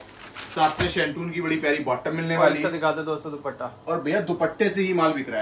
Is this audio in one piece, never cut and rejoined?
yes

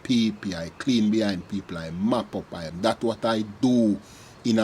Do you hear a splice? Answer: yes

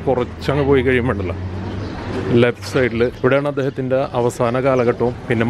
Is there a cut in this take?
yes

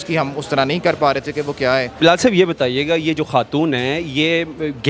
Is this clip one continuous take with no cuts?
no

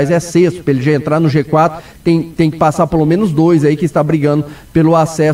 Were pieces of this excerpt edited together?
no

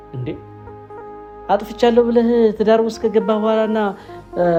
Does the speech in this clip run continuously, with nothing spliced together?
yes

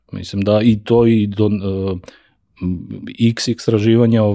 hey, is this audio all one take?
yes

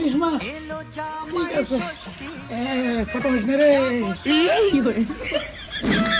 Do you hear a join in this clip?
no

